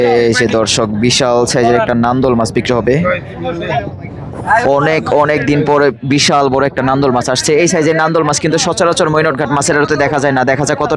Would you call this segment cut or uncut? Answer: uncut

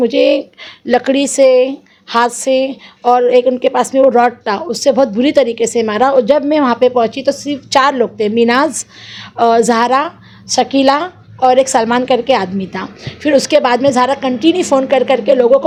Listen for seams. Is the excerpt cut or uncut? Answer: uncut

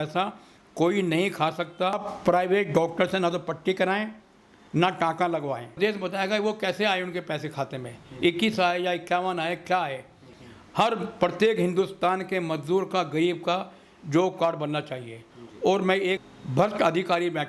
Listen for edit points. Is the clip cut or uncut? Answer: cut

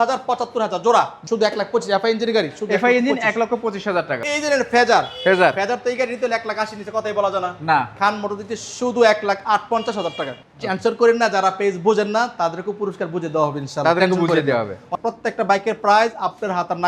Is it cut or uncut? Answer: cut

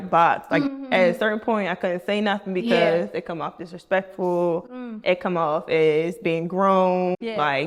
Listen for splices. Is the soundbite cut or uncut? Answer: uncut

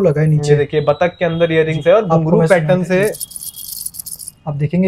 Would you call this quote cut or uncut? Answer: uncut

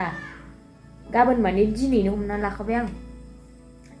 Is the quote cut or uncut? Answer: uncut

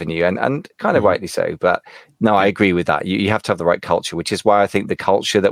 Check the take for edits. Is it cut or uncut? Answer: uncut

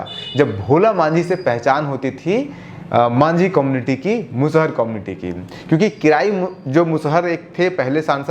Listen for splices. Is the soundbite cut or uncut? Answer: uncut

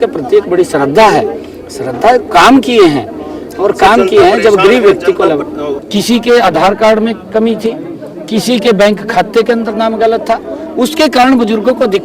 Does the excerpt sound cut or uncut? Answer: uncut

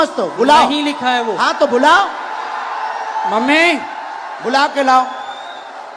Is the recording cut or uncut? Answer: uncut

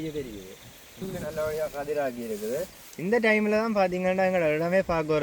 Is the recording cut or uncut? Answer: cut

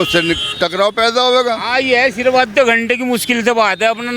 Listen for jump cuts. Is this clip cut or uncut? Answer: uncut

